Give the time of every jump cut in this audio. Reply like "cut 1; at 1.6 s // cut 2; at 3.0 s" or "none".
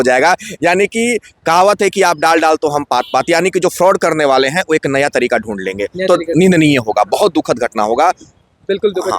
none

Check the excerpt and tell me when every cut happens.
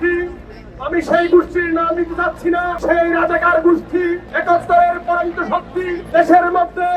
cut 1; at 2.8 s

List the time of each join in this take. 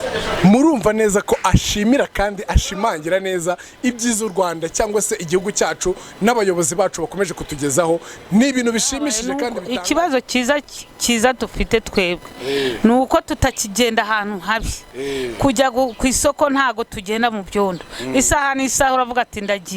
cut 1; at 9.5 s

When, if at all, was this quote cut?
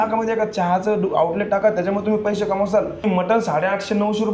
cut 1; at 3.0 s

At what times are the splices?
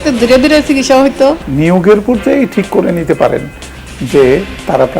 cut 1; at 1.4 s

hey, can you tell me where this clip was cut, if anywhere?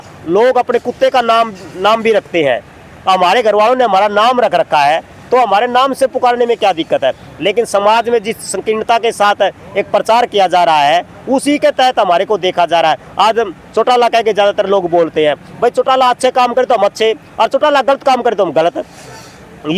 none

